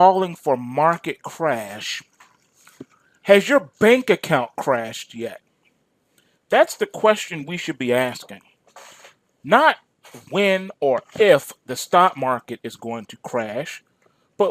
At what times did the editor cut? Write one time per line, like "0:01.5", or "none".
0:13.2